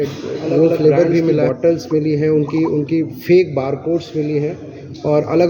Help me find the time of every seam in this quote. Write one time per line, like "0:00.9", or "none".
0:01.4